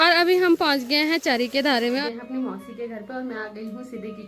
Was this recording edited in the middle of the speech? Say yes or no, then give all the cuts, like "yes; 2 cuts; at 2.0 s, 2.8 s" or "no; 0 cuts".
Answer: yes; 1 cut; at 2.0 s